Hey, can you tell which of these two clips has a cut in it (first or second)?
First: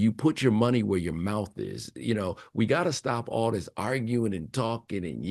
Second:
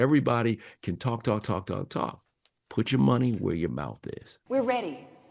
second